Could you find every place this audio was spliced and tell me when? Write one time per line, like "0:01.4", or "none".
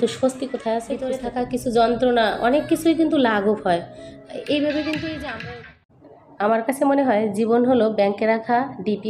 0:01.2
0:05.3